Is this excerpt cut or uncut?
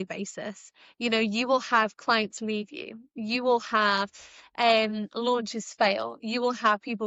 uncut